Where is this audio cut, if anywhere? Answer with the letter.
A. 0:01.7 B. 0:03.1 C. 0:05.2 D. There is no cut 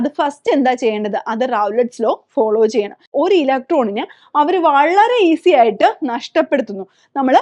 B